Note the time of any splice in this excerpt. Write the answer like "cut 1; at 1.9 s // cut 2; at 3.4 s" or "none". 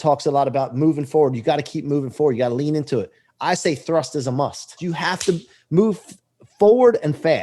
cut 1; at 4.8 s